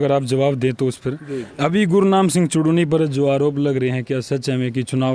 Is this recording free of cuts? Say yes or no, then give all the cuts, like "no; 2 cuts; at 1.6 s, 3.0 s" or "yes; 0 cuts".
yes; 0 cuts